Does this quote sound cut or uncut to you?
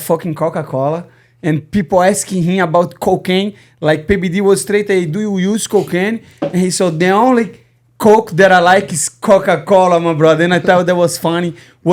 uncut